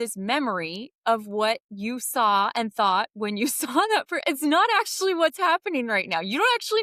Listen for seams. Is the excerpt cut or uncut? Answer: uncut